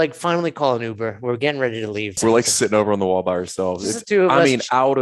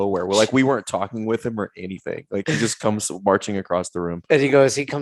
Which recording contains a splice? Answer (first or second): first